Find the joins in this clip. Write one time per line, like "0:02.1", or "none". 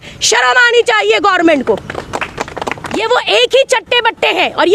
0:02.9

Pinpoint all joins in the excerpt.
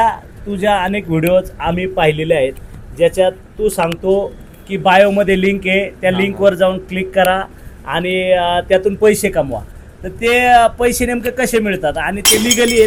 none

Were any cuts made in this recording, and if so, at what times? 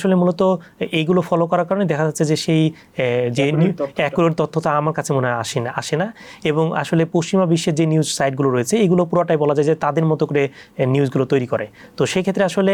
none

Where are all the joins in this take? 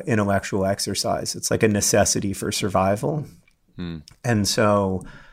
0:01.3

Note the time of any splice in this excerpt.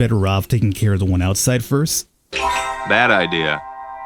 none

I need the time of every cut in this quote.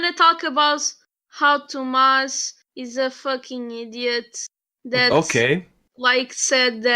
0:05.8

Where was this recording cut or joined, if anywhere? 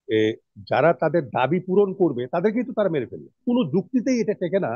0:03.4

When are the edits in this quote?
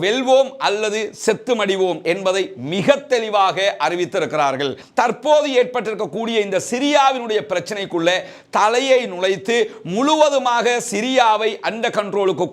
0:04.8

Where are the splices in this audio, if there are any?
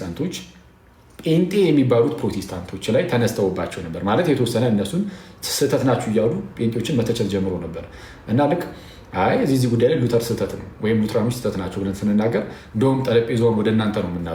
none

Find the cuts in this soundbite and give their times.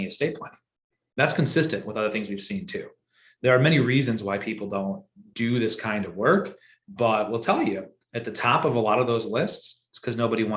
none

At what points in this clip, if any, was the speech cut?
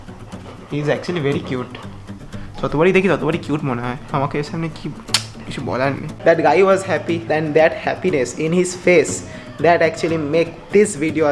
0:06.1
0:07.2

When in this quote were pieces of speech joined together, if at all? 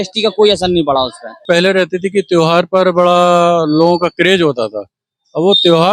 0:01.4

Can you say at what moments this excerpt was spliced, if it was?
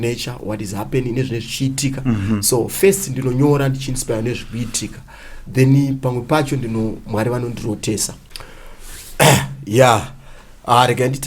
0:08.2

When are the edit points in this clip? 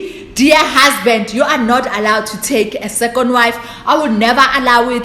none

